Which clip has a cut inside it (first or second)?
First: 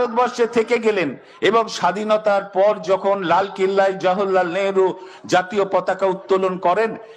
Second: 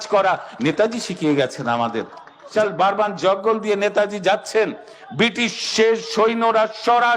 second